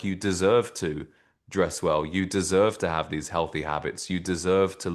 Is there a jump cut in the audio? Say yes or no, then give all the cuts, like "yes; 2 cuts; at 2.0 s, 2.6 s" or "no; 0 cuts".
no; 0 cuts